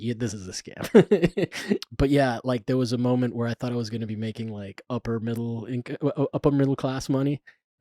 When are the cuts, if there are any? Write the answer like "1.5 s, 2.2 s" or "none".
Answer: 1.8 s